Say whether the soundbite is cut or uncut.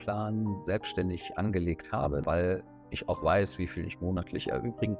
cut